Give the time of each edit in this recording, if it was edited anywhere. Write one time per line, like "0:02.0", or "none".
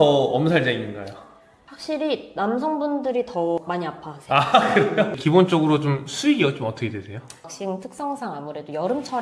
0:05.2
0:07.4